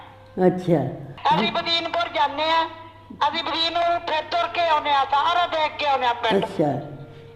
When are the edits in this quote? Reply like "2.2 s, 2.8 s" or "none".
1.1 s